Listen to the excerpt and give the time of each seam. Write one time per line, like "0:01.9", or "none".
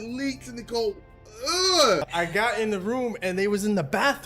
0:01.9

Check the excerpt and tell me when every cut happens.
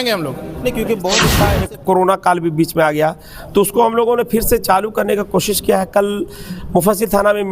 0:01.3

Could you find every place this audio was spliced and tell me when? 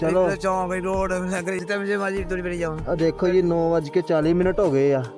0:01.6

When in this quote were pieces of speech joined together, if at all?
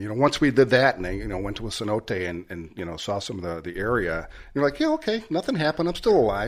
none

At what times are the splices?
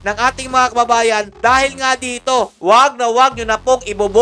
0:02.5

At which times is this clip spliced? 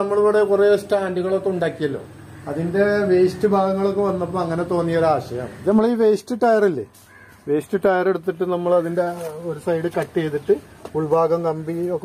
0:05.6

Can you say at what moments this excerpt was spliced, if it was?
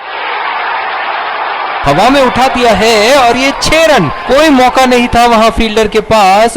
0:01.8

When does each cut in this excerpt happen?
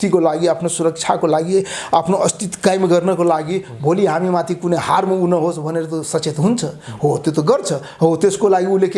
none

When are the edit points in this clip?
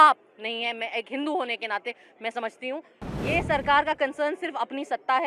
0:03.0

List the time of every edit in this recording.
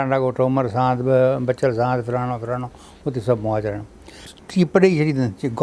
0:04.3

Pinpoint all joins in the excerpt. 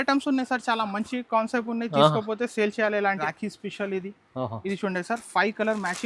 0:03.2

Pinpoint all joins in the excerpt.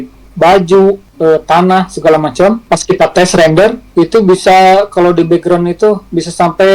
0:01.1
0:02.6
0:03.8

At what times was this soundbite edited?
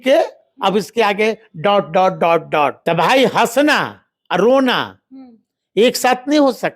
0:02.8

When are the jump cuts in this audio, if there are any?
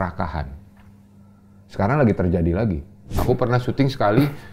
0:03.1

